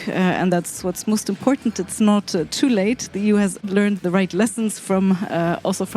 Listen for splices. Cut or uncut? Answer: cut